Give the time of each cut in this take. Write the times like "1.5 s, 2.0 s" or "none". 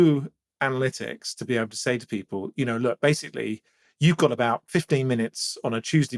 none